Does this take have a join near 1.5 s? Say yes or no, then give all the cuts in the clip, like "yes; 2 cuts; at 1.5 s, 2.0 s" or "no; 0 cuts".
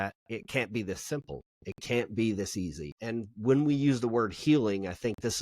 no; 1 cut; at 2.9 s